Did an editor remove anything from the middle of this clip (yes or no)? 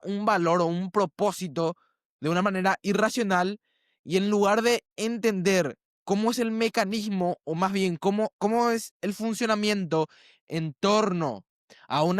no